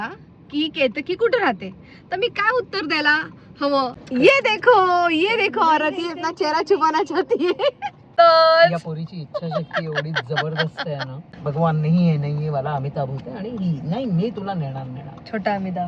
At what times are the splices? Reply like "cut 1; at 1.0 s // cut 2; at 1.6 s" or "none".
cut 1; at 4.0 s // cut 2; at 8.0 s // cut 3; at 11.3 s